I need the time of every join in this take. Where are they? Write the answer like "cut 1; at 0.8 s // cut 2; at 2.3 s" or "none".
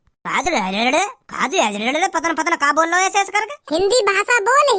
cut 1; at 3.6 s